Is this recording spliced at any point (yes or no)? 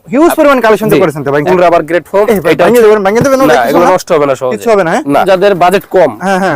yes